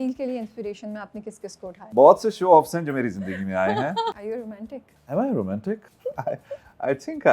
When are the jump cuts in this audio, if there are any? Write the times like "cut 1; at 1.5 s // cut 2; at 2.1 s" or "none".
cut 1; at 1.8 s // cut 2; at 4.2 s // cut 3; at 5.9 s